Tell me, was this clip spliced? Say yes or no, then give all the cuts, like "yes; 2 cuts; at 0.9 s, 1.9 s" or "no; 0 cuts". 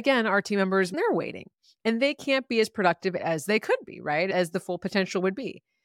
yes; 1 cut; at 0.9 s